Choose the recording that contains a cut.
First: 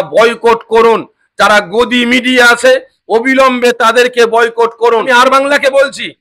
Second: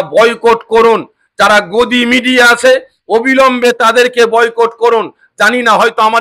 first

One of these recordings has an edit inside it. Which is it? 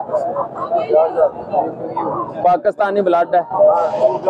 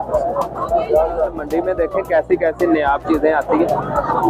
second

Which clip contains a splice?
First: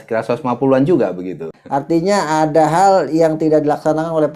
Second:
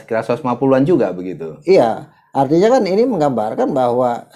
first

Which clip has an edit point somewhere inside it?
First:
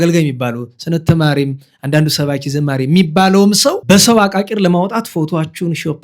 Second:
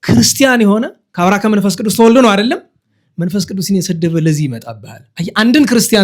first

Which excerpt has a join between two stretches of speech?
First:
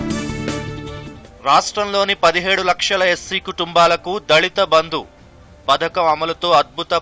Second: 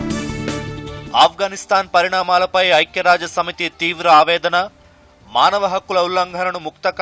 first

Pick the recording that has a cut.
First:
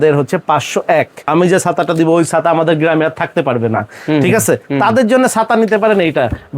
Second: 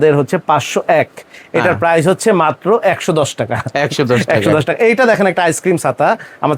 first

